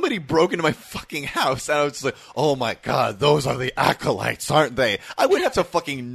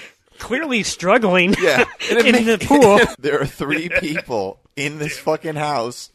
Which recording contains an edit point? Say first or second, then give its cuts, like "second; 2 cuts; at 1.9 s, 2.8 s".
second; 1 cut; at 3.1 s